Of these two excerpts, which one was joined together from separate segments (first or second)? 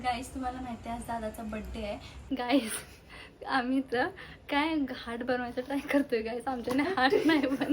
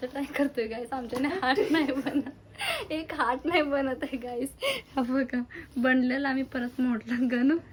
first